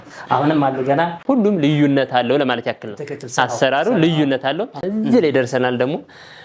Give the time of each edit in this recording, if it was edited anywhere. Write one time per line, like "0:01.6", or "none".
0:01.2
0:04.9